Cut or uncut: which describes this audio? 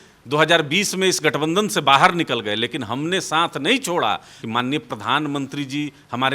cut